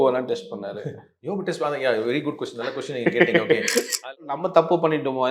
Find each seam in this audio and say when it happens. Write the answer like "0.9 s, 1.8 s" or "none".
4.4 s